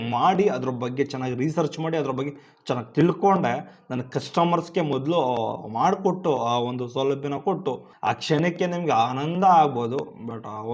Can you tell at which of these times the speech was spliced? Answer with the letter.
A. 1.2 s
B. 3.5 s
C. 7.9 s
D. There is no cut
C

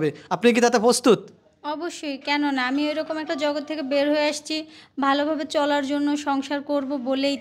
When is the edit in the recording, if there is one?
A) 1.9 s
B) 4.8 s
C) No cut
C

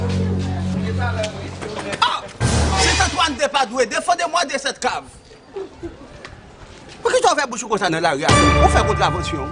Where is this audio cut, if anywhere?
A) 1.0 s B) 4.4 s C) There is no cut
A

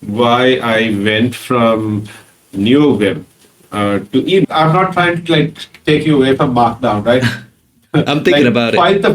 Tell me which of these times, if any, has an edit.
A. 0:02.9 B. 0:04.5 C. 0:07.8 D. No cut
B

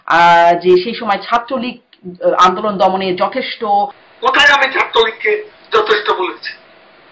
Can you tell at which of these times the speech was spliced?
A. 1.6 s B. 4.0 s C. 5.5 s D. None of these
B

